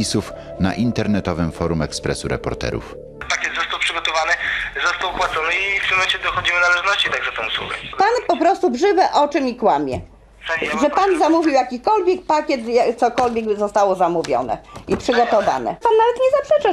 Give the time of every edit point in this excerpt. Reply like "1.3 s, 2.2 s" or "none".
3.2 s